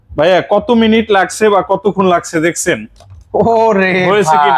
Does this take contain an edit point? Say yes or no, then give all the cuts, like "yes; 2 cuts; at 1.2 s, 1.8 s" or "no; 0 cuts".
no; 0 cuts